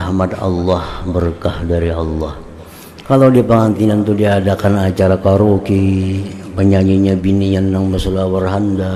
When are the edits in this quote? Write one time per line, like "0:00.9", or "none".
none